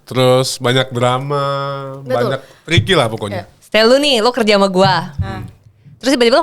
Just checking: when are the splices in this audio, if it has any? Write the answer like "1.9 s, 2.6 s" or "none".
3.5 s